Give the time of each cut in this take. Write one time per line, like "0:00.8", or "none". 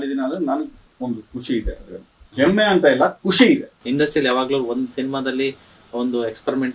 0:03.8